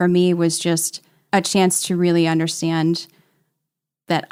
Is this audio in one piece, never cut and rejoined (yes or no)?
yes